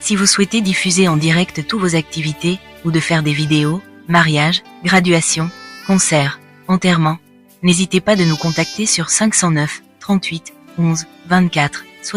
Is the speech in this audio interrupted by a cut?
no; 0 cuts

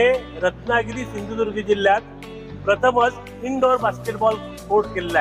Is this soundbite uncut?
yes; 0 cuts

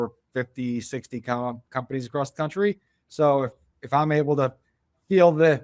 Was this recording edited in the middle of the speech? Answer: no; 0 cuts

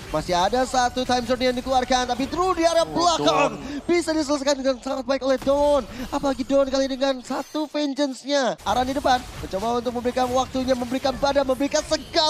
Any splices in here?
yes; 1 cut; at 8.6 s

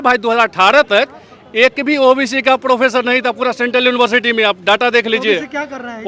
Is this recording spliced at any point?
no; 0 cuts

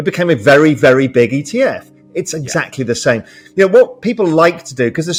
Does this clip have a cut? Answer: no; 0 cuts

